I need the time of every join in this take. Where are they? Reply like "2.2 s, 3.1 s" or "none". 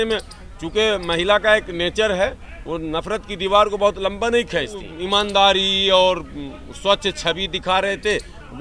4.9 s